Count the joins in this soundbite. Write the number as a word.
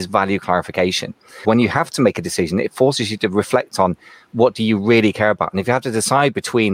one